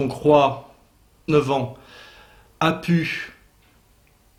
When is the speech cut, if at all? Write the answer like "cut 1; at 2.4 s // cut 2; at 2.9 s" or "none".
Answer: none